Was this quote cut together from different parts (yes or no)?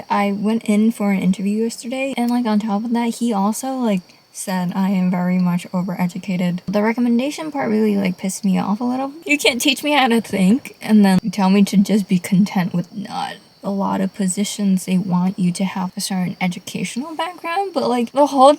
yes